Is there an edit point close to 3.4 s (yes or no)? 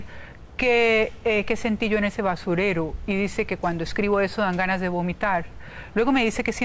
no